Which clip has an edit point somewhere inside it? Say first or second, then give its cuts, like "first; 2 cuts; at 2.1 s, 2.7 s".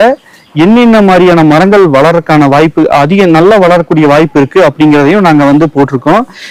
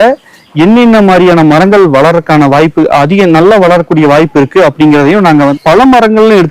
second; 1 cut; at 5.5 s